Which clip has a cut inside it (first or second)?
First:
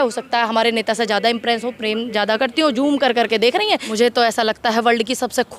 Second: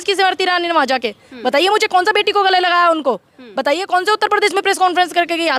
first